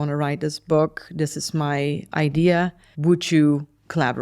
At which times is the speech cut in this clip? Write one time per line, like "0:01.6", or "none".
0:02.8